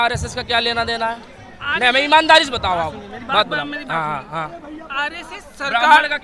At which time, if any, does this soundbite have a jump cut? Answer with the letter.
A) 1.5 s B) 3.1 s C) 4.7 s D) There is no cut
D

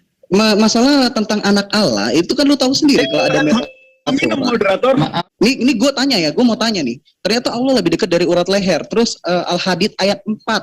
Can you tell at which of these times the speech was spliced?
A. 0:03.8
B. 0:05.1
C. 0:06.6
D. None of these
B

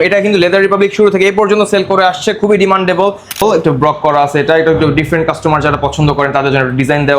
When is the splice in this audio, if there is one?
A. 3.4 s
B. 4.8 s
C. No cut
A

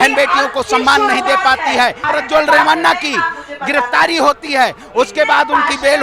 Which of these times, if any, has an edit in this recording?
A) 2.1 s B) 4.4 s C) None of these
A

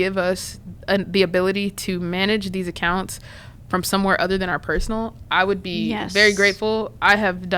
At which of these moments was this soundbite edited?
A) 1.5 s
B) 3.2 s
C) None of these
C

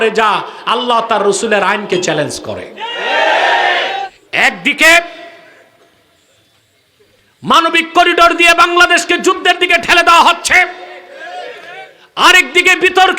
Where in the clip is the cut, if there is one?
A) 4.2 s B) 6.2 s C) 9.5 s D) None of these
A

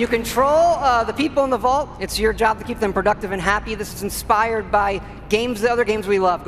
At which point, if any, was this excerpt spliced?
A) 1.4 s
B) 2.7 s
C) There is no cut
B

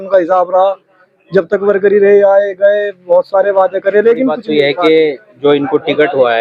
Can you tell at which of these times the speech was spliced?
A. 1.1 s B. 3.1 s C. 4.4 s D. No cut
C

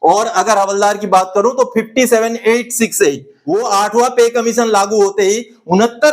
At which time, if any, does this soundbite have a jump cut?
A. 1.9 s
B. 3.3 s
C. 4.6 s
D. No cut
B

